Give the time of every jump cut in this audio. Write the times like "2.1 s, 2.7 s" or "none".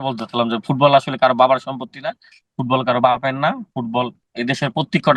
4.2 s